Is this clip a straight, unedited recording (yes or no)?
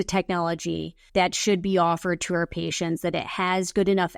no